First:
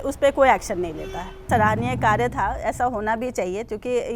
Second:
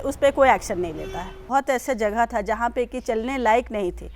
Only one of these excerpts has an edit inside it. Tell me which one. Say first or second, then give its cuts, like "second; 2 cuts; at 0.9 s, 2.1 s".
second; 1 cut; at 1.4 s